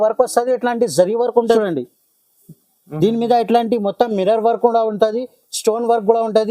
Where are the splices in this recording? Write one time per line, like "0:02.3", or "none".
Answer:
0:01.6